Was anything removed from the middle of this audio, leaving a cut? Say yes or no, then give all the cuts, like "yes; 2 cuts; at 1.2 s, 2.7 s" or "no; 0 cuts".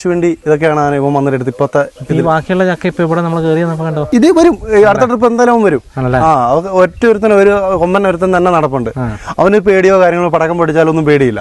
yes; 1 cut; at 4.1 s